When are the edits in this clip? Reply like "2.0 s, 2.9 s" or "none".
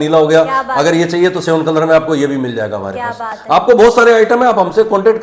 none

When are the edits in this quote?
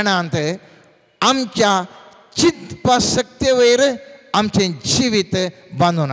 none

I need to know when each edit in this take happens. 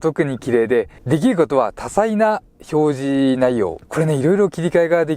1.0 s, 3.8 s

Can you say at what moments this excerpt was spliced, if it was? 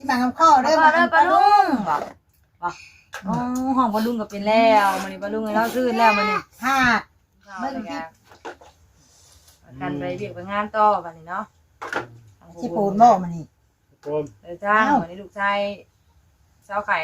8.0 s

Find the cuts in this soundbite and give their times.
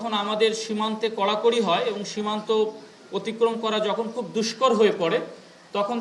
none

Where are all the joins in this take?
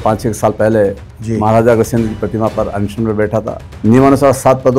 3.6 s

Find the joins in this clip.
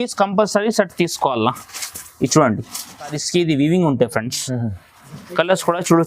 3.2 s

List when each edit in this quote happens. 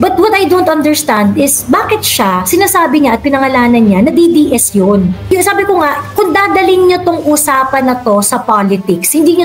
5.2 s

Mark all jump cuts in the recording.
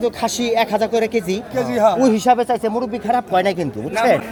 none

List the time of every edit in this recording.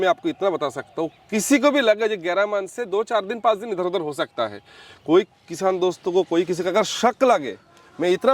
none

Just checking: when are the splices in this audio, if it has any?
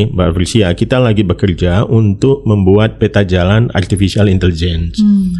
none

